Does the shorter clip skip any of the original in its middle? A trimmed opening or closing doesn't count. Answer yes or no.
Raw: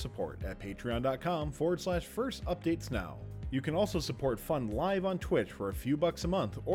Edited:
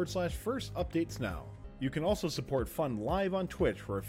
no